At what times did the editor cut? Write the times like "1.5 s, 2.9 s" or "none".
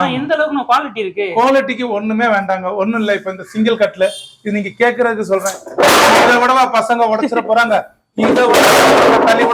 none

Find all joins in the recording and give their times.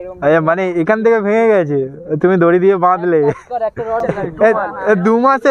4.0 s

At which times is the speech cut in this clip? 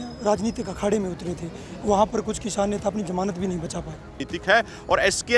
4.2 s

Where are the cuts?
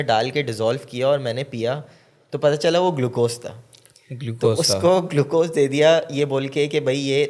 none

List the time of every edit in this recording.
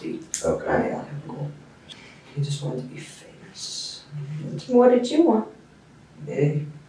1.8 s

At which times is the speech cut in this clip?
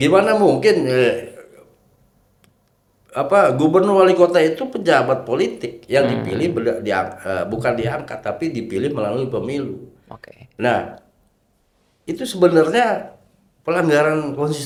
none

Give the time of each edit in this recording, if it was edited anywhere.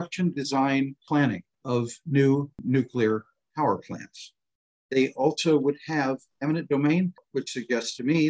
1.2 s, 2.5 s, 7.2 s

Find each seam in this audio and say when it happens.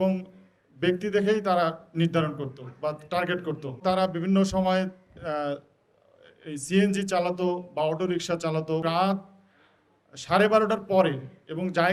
3.8 s, 8.8 s

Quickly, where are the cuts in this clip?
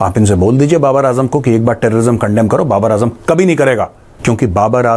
4.0 s

